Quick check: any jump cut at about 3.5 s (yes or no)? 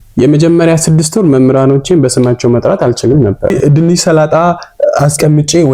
yes